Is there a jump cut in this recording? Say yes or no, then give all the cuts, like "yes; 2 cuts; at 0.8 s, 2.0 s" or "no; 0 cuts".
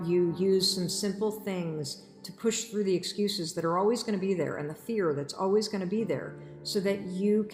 no; 0 cuts